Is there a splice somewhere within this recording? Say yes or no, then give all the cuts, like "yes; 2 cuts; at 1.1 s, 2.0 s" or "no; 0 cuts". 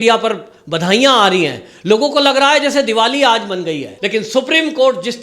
yes; 1 cut; at 3.9 s